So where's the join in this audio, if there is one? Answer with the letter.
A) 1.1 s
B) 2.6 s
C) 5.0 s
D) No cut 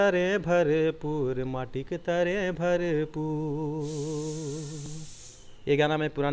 D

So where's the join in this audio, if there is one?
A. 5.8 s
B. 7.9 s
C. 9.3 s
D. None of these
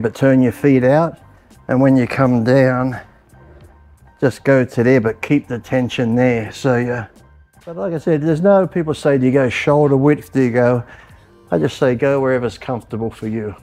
B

